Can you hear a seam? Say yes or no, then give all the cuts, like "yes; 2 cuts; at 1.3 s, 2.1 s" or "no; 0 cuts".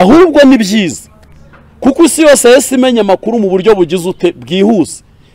no; 0 cuts